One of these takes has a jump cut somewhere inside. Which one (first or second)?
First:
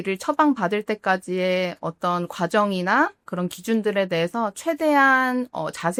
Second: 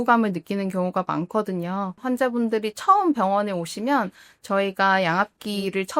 second